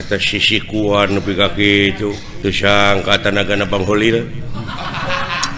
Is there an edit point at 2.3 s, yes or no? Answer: yes